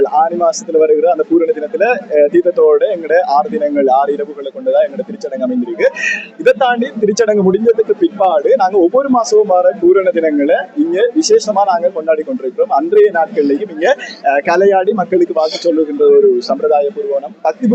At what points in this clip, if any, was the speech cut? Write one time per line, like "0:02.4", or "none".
none